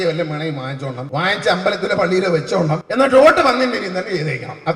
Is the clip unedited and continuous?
no; 2 cuts; at 1.0 s, 2.8 s

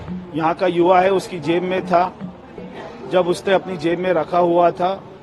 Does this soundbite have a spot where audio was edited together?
no; 0 cuts

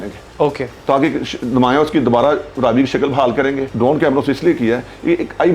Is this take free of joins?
no; 1 cut; at 3.7 s

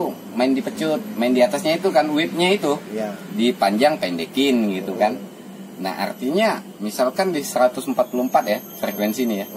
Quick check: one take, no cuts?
yes; 0 cuts

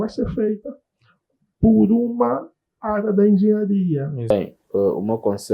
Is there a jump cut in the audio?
yes; 1 cut; at 4.3 s

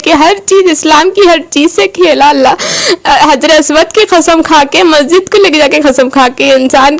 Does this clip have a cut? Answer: no; 0 cuts

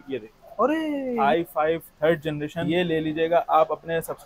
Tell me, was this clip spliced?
yes; 2 cuts; at 1.2 s, 2.6 s

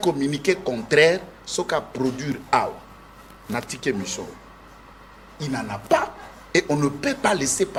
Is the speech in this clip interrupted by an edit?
no; 0 cuts

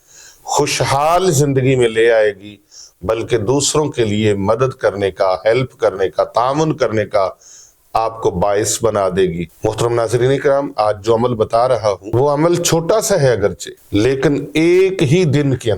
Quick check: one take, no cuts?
no; 3 cuts; at 9.5 s, 12.0 s, 13.7 s

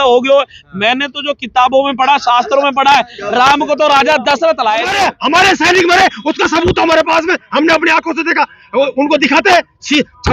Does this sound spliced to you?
yes; 1 cut; at 4.9 s

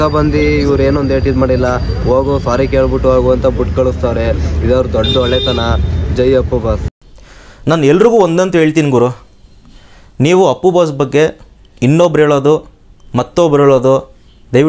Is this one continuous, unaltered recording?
no; 1 cut; at 6.9 s

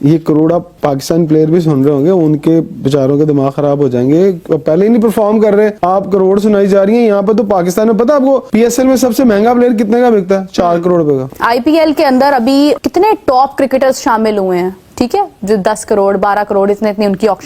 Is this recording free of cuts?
yes; 0 cuts

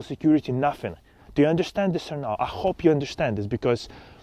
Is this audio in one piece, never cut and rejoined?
yes; 0 cuts

